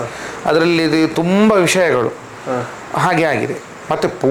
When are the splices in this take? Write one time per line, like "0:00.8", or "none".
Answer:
none